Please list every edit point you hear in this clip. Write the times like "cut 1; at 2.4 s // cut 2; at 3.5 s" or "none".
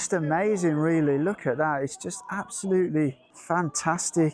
cut 1; at 3.3 s